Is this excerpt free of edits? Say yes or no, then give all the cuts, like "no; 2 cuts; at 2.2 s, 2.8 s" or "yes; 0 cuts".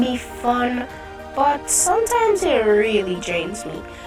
yes; 0 cuts